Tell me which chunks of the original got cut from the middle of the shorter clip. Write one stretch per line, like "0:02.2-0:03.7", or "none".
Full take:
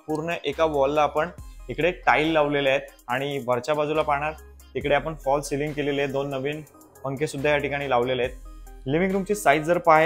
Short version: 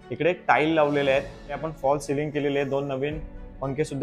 0:03.2-0:05.0